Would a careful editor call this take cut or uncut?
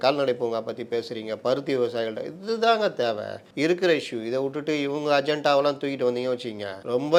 uncut